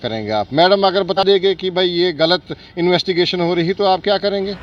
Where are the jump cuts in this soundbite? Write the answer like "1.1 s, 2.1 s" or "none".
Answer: 1.2 s